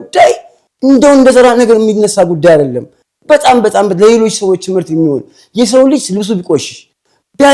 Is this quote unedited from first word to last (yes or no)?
yes